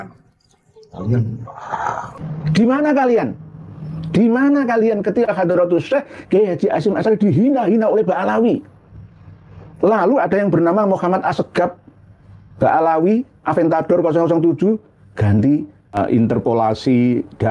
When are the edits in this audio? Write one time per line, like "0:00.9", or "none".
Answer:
0:16.0